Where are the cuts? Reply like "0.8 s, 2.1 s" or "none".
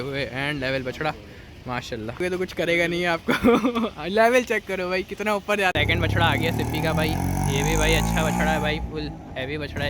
2.2 s, 5.7 s